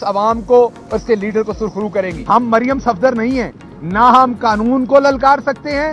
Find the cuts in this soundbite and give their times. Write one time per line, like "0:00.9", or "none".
0:02.2